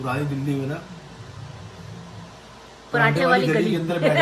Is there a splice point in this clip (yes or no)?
no